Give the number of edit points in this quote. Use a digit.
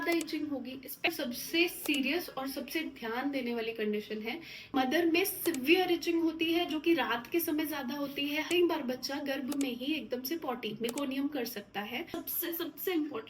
4